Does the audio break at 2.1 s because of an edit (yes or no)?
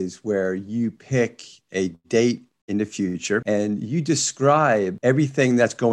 no